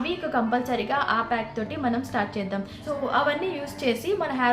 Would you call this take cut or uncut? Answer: cut